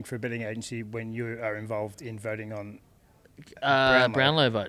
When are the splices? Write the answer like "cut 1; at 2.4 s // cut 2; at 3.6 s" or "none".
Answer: none